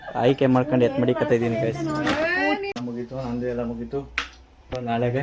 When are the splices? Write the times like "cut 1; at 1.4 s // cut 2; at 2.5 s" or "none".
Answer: cut 1; at 2.8 s